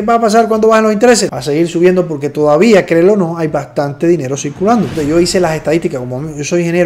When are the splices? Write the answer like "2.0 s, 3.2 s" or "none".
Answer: 1.3 s, 4.9 s